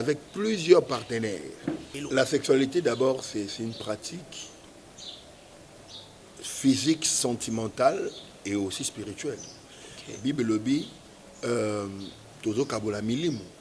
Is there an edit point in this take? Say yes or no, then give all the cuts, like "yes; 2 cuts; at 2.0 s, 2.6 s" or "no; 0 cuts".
yes; 1 cut; at 2.0 s